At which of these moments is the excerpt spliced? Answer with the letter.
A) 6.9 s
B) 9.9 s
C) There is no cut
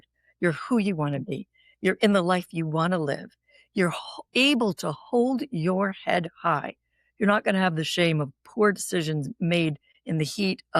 B